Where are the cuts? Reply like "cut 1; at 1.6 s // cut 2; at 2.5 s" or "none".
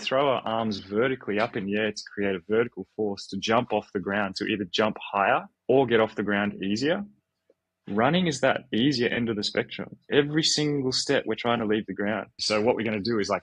cut 1; at 5.5 s // cut 2; at 12.4 s